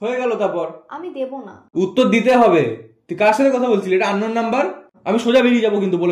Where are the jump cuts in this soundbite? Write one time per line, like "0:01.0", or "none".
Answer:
0:01.6
0:04.9